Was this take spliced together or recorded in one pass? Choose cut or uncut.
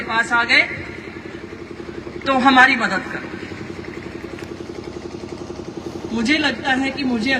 uncut